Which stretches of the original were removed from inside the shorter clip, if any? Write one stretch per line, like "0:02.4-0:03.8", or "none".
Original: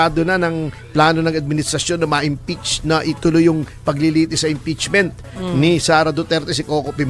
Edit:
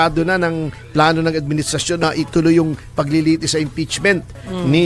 0:02.0-0:02.9